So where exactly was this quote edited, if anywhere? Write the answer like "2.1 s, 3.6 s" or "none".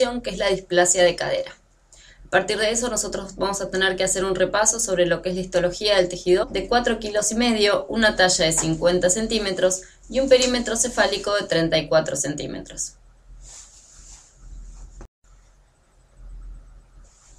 none